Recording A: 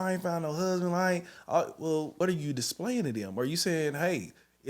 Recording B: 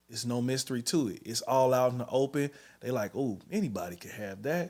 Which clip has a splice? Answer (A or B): A